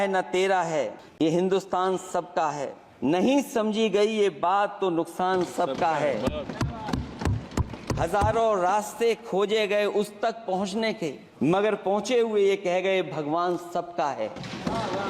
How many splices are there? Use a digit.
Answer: 3